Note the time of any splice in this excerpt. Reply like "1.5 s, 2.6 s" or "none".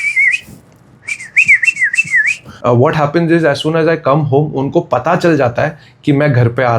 2.4 s